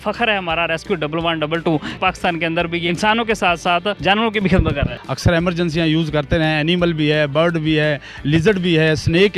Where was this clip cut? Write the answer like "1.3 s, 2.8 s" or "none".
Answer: 1.9 s, 2.9 s, 4.0 s, 4.9 s